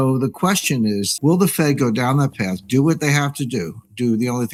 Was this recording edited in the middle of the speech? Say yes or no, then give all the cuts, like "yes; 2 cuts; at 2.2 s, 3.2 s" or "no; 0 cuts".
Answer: no; 0 cuts